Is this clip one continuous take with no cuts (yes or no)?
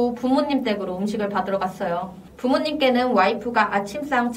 no